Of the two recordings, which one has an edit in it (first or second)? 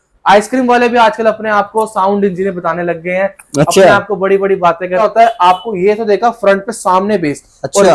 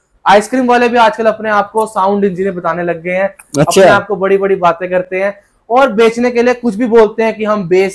first